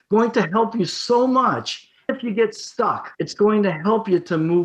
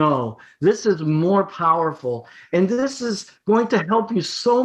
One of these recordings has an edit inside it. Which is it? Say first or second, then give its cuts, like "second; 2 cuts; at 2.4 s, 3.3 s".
first; 1 cut; at 3.1 s